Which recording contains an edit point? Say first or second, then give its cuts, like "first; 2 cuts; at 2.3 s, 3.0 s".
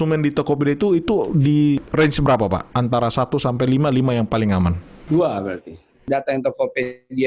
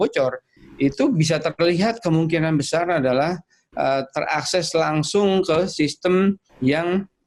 first; 3 cuts; at 1.9 s, 4.9 s, 6.1 s